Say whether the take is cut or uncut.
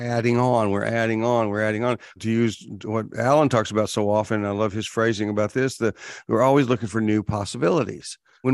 uncut